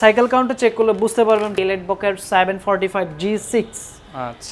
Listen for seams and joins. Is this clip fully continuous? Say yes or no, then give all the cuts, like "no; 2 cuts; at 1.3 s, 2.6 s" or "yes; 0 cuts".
no; 1 cut; at 1.5 s